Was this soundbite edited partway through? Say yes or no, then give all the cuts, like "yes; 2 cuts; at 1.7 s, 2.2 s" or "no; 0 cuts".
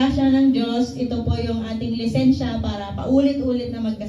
no; 0 cuts